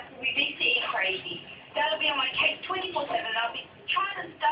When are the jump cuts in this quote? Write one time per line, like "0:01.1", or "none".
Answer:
none